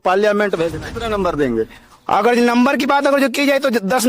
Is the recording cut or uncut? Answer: cut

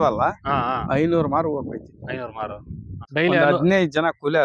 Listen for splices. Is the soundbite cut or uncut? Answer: cut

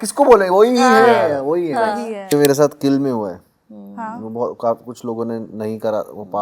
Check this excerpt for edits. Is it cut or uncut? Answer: cut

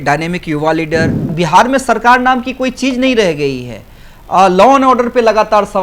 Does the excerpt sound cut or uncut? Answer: cut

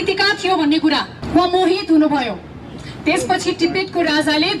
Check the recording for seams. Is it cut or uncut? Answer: cut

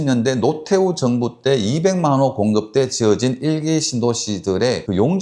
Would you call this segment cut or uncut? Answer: uncut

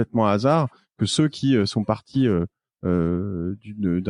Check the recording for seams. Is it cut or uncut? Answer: uncut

